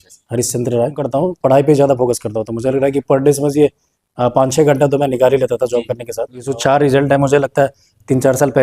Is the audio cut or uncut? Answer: cut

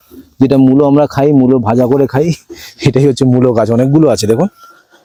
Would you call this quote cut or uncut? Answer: uncut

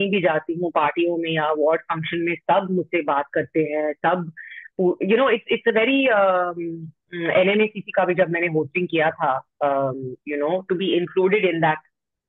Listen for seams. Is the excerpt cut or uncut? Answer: uncut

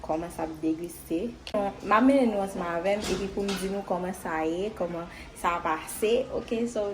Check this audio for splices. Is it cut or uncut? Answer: cut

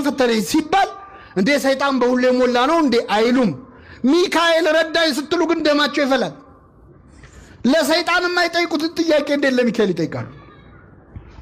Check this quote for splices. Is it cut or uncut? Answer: uncut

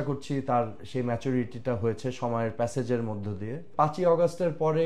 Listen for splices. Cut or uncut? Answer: cut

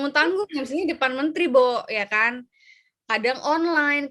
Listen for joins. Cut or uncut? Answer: uncut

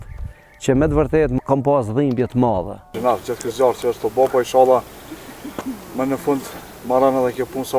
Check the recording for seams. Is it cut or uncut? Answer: cut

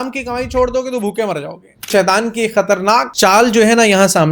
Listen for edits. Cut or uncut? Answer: cut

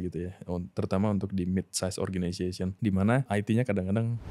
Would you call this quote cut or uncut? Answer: cut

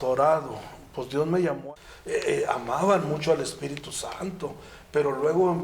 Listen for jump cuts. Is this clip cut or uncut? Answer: cut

